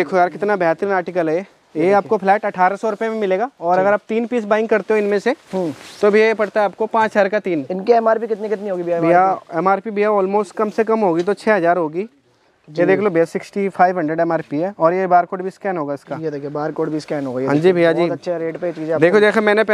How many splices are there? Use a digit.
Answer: 0